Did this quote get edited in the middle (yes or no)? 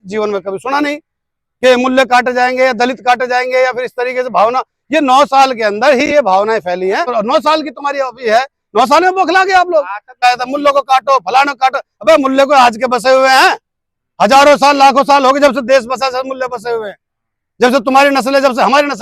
yes